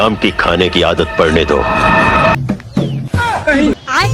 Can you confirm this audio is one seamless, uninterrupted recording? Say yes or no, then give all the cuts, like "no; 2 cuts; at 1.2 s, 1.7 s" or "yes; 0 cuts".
no; 1 cut; at 2.3 s